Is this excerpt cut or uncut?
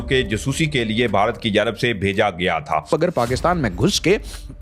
cut